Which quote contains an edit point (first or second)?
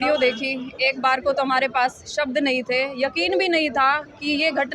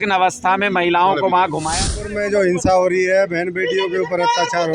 second